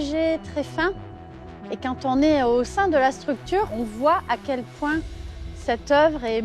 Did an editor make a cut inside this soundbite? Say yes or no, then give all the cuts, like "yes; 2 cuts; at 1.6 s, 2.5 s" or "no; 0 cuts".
yes; 1 cut; at 3.7 s